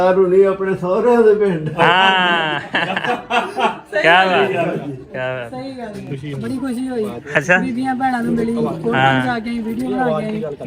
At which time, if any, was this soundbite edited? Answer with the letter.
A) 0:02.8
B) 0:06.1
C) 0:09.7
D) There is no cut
B